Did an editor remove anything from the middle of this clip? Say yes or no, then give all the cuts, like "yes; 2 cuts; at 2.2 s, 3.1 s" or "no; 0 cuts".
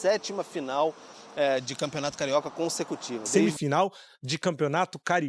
yes; 1 cut; at 3.2 s